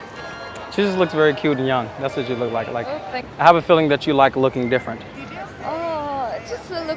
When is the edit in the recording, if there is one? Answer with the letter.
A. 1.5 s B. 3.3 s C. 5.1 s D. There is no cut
B